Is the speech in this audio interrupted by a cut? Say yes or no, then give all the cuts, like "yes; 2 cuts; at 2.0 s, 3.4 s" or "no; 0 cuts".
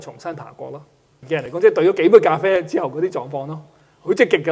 yes; 1 cut; at 1.1 s